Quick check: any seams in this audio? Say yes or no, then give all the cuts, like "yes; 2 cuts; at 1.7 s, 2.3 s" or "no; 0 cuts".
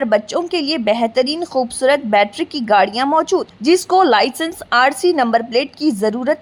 no; 0 cuts